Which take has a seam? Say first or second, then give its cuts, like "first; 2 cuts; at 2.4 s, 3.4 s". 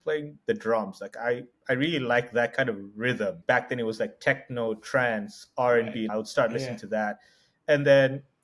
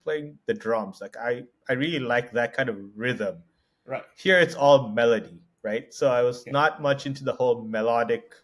first; 2 cuts; at 3.4 s, 6.1 s